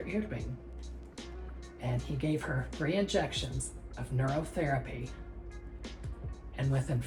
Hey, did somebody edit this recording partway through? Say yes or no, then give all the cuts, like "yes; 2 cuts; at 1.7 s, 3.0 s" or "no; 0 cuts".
no; 0 cuts